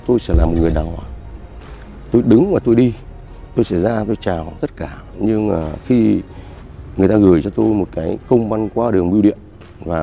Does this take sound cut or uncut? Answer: uncut